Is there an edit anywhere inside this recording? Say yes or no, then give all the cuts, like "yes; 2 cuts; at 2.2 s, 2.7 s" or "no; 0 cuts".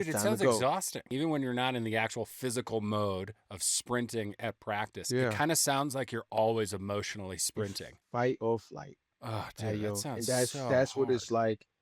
yes; 1 cut; at 1.1 s